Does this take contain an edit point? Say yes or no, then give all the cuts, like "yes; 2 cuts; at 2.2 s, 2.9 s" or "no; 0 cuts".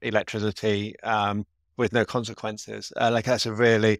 no; 0 cuts